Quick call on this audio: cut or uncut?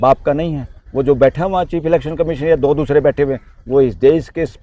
uncut